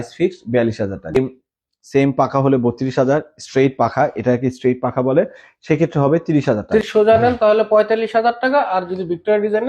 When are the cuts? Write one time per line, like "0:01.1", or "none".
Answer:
0:01.1
0:06.9

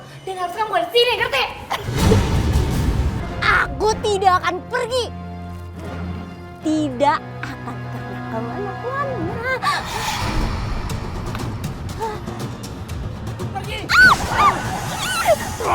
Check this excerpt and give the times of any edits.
0:03.2

